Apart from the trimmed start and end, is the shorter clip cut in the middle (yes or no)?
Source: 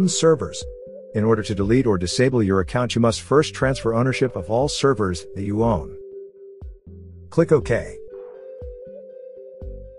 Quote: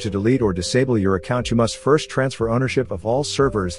no